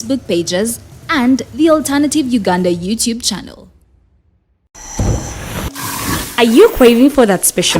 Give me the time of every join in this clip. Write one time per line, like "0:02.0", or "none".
0:04.7